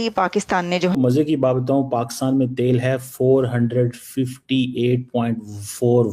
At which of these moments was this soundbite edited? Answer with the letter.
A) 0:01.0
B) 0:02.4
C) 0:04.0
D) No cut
A